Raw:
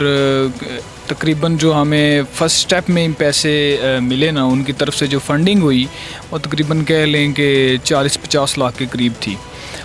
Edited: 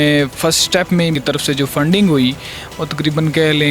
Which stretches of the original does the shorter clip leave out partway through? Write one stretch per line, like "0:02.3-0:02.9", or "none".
0:03.1-0:04.7